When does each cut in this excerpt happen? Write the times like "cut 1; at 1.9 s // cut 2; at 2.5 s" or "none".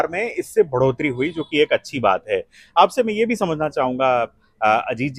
none